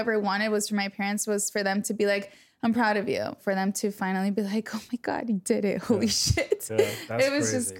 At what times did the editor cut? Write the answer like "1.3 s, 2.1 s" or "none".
3.4 s